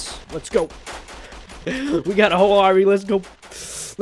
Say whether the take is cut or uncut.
uncut